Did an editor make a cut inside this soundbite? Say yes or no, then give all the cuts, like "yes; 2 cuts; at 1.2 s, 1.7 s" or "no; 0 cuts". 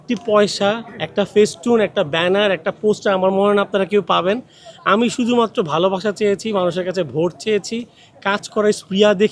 no; 0 cuts